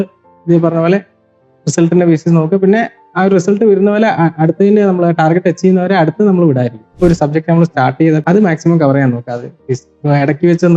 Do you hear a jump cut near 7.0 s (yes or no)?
yes